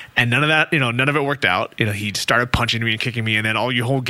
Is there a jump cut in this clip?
no; 0 cuts

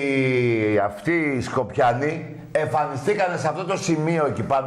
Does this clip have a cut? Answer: yes; 1 cut; at 1.7 s

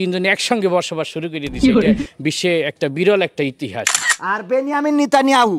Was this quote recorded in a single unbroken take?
no; 3 cuts; at 1.4 s, 2.3 s, 4.1 s

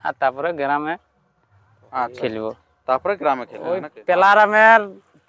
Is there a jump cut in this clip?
yes; 1 cut; at 3.9 s

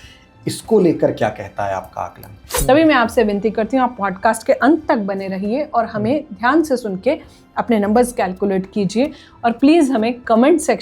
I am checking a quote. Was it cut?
yes; 1 cut; at 2.5 s

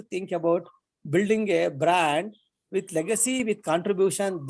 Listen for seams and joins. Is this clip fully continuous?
yes; 0 cuts

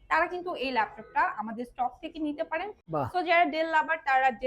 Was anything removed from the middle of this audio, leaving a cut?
yes; 1 cut; at 2.8 s

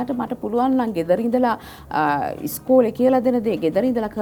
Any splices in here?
no; 0 cuts

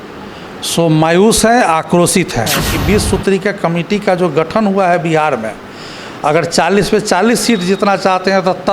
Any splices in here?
yes; 1 cut; at 2.7 s

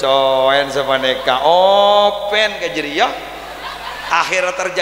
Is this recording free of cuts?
yes; 0 cuts

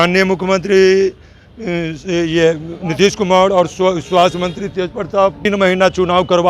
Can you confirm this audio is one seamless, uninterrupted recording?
no; 1 cut; at 5.5 s

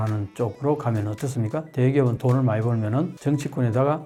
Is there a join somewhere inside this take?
no; 0 cuts

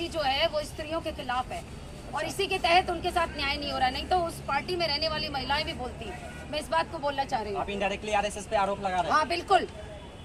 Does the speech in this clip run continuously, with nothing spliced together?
yes; 0 cuts

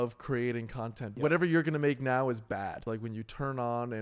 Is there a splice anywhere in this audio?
yes; 2 cuts; at 1.1 s, 2.8 s

